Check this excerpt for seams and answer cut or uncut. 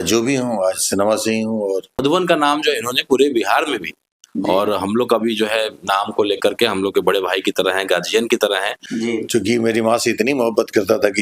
cut